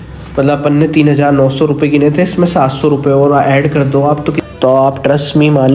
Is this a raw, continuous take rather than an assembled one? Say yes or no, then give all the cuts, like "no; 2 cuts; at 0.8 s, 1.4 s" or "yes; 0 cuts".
no; 1 cut; at 4.4 s